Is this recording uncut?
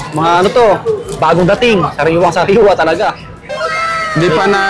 yes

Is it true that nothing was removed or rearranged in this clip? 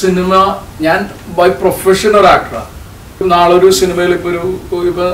no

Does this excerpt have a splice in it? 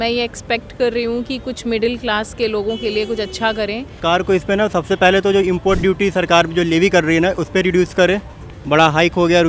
yes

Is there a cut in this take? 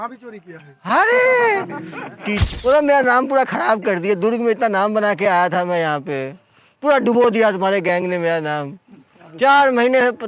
yes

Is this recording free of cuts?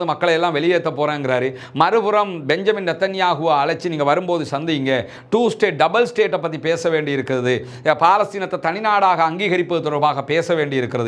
yes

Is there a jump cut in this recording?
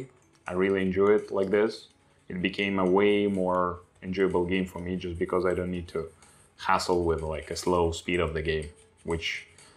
no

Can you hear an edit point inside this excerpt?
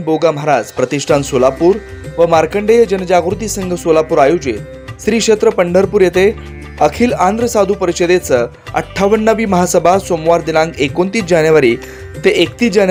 no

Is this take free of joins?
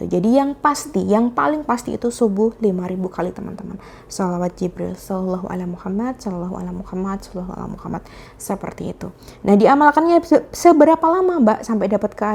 yes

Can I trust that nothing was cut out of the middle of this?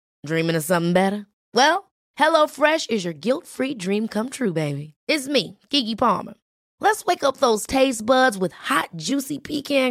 yes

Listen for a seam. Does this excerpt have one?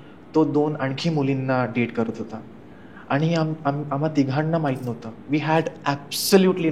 no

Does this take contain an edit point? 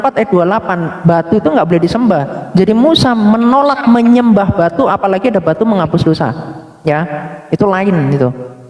no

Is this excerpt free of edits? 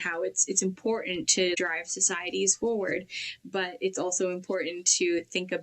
no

